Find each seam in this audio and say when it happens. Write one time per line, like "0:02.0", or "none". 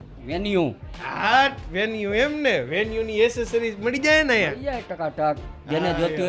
none